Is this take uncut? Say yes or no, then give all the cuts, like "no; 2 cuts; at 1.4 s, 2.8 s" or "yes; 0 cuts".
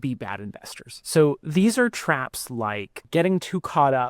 no; 1 cut; at 3.0 s